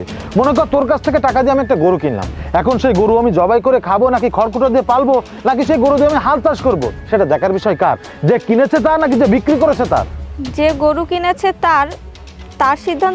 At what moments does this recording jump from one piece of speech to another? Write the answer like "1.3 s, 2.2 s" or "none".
none